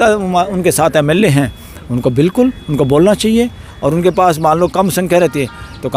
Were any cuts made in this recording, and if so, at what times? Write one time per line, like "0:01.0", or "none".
none

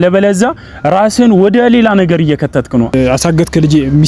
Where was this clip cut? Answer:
0:02.9

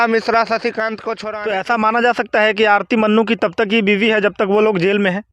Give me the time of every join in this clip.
0:01.2

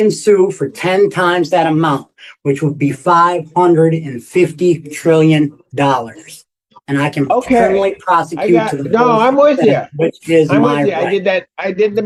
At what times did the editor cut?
none

